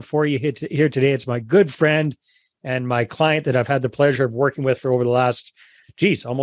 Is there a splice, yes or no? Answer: no